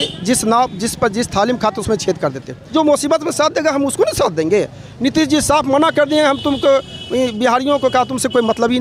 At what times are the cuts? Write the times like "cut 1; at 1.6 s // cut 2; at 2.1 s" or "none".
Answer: cut 1; at 2.5 s